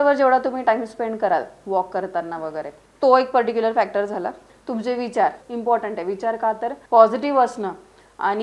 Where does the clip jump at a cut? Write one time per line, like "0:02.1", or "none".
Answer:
0:02.8
0:04.5
0:05.5
0:06.7